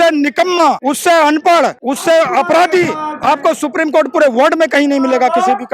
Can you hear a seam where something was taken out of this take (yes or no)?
yes